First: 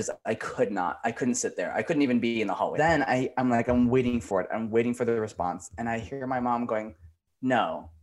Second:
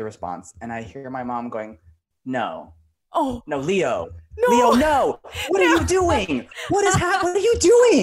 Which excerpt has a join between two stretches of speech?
first; 1 cut; at 2.7 s

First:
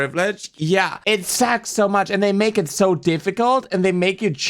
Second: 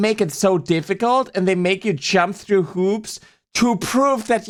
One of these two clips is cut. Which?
first; 1 cut; at 1.0 s

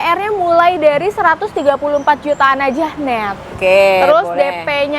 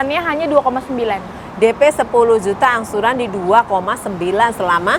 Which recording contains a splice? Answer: first; 1 cut; at 3.5 s

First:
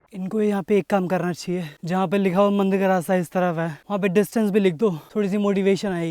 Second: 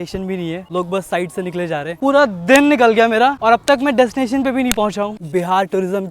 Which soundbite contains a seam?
second; 2 cuts; at 1.9 s, 5.1 s

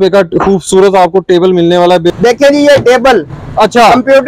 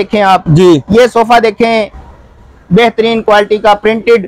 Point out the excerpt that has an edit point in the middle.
first; 1 cut; at 2.2 s

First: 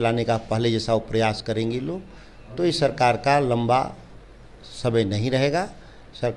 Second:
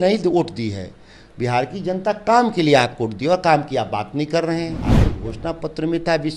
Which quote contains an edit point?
second; 1 cut; at 5.1 s

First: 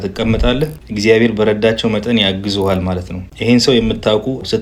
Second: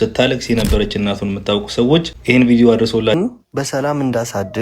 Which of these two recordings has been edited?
second; 1 cut; at 3.2 s

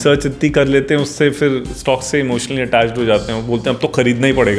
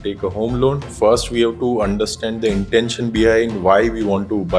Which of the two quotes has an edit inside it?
second; 1 cut; at 0.9 s

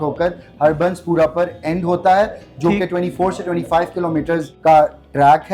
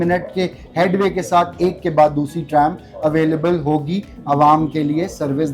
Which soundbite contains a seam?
first; 1 cut; at 4.5 s

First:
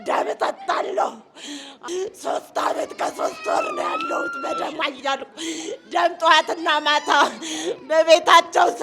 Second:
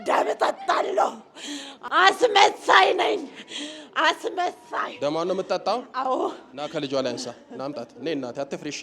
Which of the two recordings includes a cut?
first; 1 cut; at 1.8 s

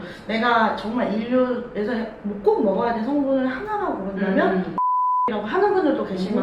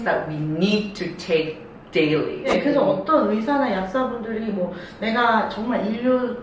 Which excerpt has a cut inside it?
second; 1 cut; at 2.5 s

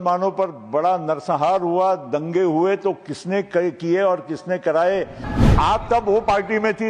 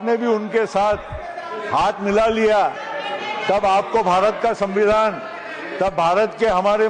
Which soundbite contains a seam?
first; 1 cut; at 5.2 s

